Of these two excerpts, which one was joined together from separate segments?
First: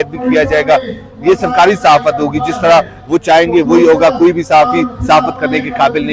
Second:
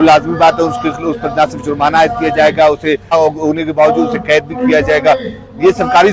second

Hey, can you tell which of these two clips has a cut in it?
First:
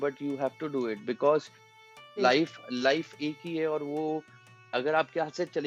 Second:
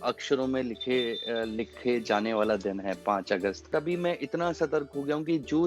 second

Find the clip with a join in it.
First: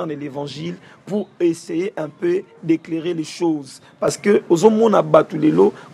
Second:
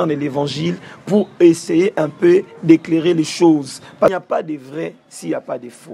second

